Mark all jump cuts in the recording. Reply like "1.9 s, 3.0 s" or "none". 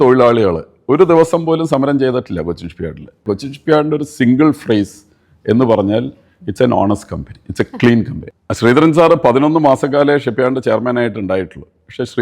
3.2 s, 8.2 s